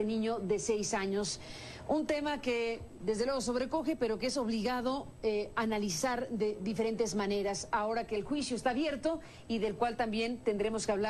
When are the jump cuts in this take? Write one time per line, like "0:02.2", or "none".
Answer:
none